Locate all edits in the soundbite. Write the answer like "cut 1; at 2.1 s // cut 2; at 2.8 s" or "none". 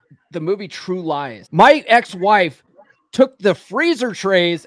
cut 1; at 1.4 s